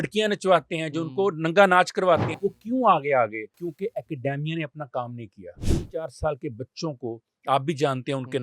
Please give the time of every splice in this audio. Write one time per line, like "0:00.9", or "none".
0:02.3
0:03.5
0:05.5